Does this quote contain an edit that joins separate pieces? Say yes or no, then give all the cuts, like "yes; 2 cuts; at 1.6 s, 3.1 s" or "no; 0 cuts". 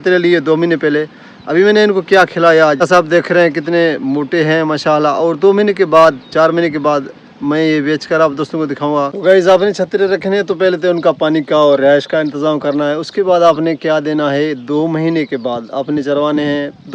no; 0 cuts